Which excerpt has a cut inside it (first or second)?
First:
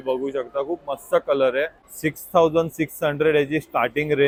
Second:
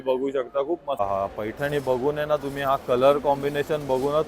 second